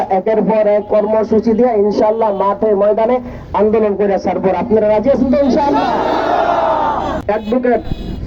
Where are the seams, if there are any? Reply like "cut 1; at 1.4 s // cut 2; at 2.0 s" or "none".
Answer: cut 1; at 7.2 s